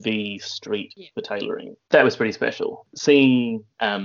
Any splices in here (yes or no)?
yes